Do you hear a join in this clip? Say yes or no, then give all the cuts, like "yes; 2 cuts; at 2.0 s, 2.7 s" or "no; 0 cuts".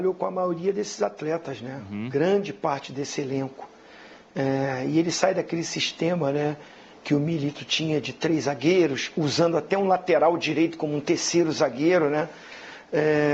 no; 0 cuts